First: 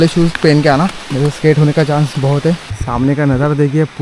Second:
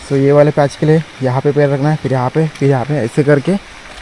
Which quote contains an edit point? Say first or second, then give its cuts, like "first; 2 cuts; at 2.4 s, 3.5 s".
first; 2 cuts; at 1.0 s, 2.7 s